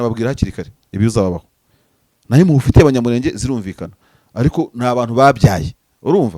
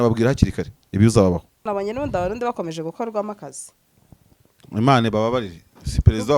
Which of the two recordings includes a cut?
second; 1 cut; at 1.6 s

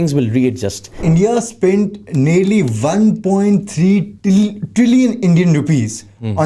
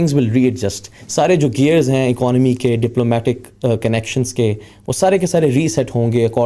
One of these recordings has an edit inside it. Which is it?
first; 1 cut; at 1.0 s

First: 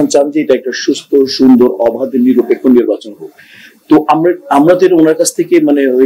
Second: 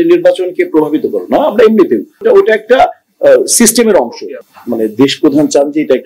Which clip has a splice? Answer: second; 2 cuts; at 2.2 s, 4.3 s

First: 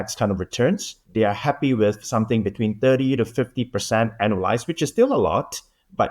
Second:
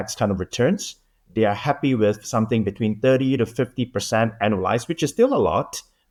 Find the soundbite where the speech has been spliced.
first; 1 cut; at 1.0 s

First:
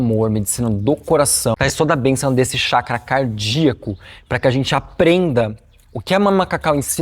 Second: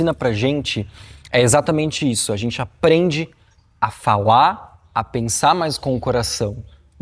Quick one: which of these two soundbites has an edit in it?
first; 1 cut; at 1.6 s

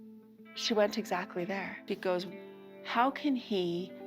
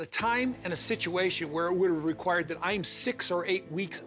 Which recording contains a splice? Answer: first; 1 cut; at 1.8 s

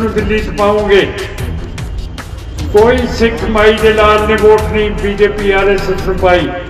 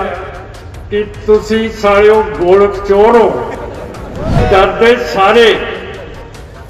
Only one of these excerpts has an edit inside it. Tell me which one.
second; 1 cut; at 4.4 s

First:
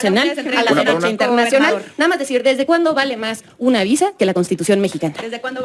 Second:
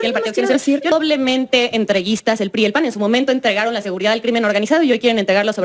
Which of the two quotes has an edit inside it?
second; 1 cut; at 0.9 s

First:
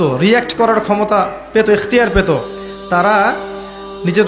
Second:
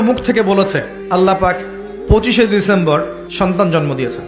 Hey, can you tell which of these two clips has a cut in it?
second; 2 cuts; at 0.9 s, 3.2 s

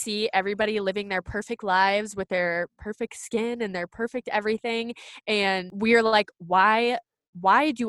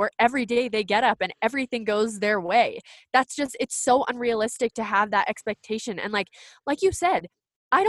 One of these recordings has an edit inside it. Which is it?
first; 1 cut; at 5.7 s

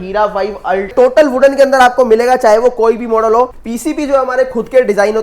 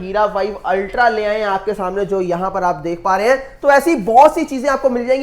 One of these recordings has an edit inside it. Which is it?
first; 2 cuts; at 0.9 s, 3.7 s

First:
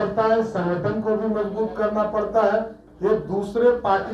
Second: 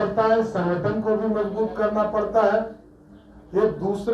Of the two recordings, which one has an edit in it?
first; 1 cut; at 2.8 s

